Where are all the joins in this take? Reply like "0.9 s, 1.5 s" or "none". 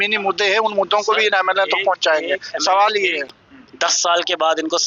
3.3 s